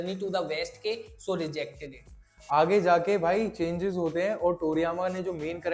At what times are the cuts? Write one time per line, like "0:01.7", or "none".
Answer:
none